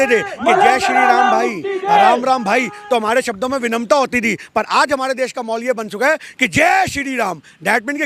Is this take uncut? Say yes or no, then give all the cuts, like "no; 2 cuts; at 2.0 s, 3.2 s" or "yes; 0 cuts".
yes; 0 cuts